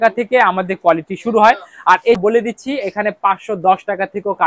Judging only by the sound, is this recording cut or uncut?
cut